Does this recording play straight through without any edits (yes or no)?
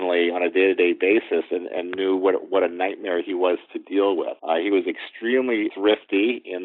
no